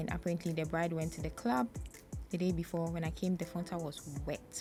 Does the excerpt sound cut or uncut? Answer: uncut